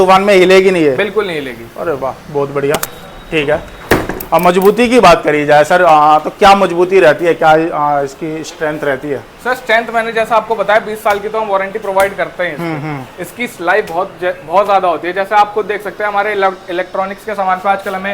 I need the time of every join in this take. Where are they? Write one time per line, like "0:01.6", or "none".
none